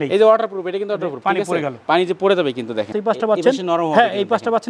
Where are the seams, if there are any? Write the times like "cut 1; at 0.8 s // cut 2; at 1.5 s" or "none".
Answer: cut 1; at 2.9 s